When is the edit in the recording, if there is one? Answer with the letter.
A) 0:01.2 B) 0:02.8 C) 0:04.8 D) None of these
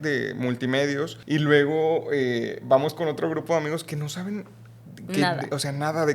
A